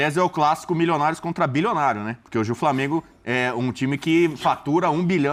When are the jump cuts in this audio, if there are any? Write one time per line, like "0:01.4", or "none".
none